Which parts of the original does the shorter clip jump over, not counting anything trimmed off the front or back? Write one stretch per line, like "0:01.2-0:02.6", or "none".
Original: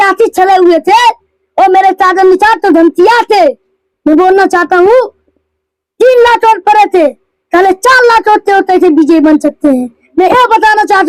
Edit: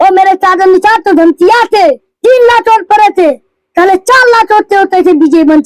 0:03.7-0:05.8